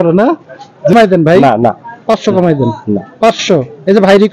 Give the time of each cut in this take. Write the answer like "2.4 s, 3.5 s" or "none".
0.9 s